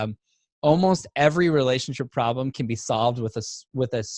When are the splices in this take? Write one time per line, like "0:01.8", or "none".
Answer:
none

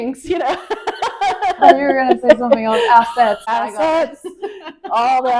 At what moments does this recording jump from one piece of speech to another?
0:01.6
0:03.4

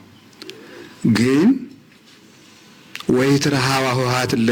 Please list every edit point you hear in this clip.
none

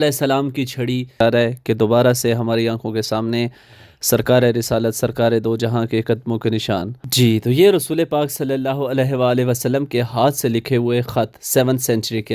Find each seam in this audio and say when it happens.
0:01.2
0:07.0

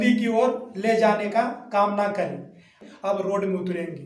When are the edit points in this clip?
0:02.8

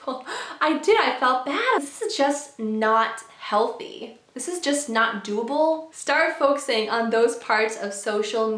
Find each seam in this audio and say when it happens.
0:01.8
0:05.9

